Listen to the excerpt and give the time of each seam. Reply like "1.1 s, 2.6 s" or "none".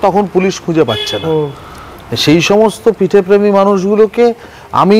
none